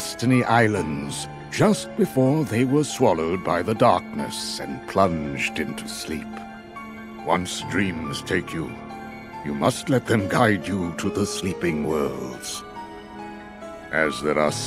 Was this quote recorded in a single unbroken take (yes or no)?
no